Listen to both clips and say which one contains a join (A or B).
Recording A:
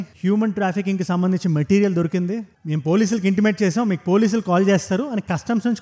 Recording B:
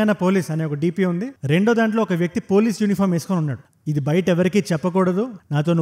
B